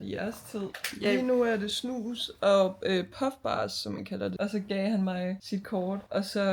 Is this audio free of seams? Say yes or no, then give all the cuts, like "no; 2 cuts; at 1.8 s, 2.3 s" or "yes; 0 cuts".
no; 1 cut; at 4.3 s